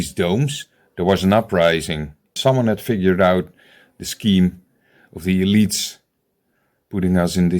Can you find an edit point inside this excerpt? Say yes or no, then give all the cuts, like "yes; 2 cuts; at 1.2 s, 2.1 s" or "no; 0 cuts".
yes; 1 cut; at 2.3 s